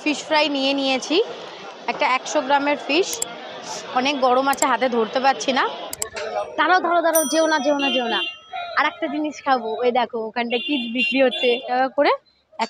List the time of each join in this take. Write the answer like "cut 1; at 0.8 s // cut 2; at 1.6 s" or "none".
cut 1; at 5.8 s // cut 2; at 11.7 s